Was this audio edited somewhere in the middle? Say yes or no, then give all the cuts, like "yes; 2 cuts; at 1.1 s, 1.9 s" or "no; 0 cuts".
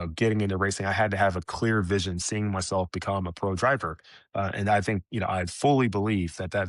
no; 0 cuts